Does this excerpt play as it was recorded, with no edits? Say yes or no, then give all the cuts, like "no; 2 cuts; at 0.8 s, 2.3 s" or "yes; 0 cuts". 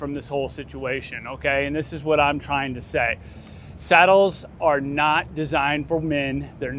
yes; 0 cuts